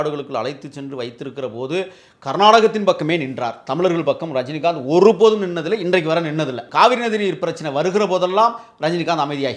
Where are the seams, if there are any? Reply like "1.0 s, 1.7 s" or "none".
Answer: 6.6 s